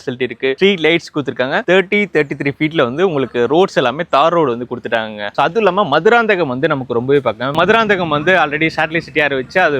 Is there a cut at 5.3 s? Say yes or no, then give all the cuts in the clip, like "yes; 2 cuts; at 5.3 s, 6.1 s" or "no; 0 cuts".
yes; 2 cuts; at 5.3 s, 7.5 s